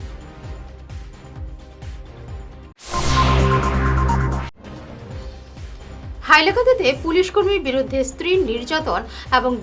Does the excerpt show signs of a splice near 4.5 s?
yes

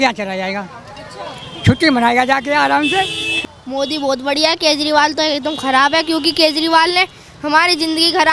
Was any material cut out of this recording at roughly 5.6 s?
no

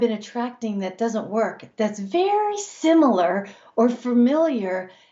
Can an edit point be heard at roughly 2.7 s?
no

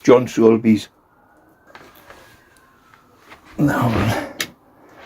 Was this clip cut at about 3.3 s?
no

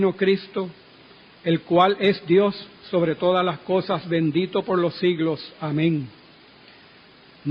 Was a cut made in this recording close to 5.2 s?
yes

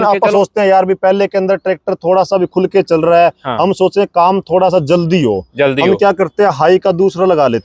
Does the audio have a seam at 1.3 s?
no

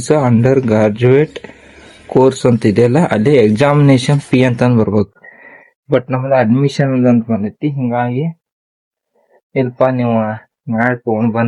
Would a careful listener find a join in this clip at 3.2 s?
no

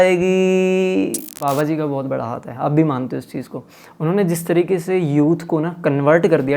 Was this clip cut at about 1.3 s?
yes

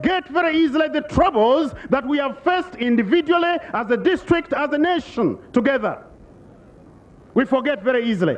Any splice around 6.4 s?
no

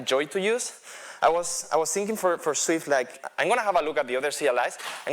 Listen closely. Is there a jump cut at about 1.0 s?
no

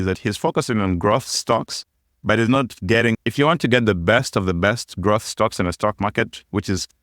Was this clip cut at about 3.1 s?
yes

